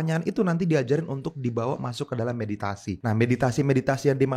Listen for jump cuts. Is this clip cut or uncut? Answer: cut